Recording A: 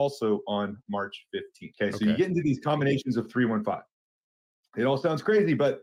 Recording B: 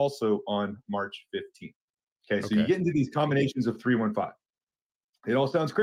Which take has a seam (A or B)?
A